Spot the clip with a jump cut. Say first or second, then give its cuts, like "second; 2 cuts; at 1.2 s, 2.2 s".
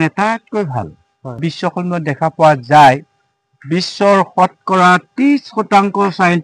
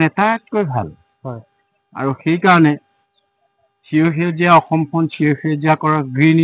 first; 1 cut; at 1.4 s